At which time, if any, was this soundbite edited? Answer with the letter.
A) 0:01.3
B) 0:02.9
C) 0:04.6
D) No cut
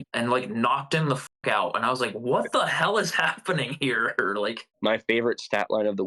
C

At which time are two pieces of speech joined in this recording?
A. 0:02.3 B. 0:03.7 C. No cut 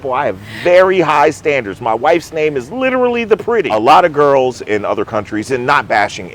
B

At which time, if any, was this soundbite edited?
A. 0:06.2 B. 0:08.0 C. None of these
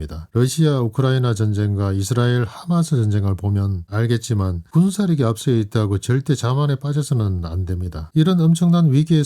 B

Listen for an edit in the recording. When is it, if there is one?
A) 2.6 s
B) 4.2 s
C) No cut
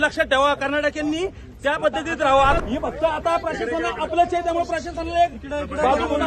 A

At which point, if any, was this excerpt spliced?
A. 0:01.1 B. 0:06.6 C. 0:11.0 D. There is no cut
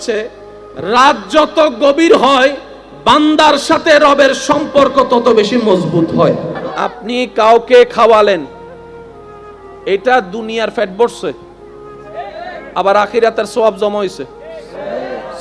B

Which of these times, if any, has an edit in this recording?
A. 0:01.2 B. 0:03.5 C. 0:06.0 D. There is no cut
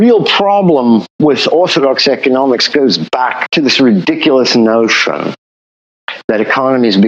B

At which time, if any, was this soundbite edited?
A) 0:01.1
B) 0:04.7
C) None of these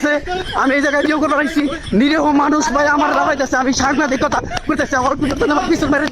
A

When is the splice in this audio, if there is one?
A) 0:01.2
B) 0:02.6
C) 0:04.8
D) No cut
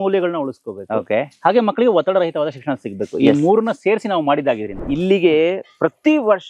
C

